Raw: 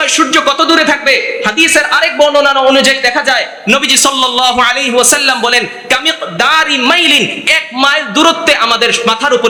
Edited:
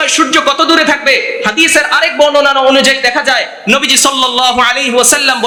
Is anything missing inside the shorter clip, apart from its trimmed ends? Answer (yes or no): no